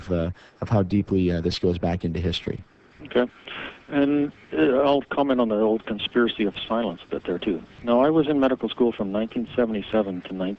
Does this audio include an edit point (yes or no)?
yes